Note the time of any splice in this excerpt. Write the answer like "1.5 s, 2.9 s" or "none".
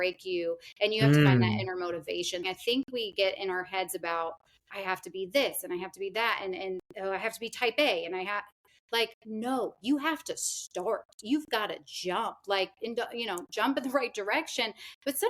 2.4 s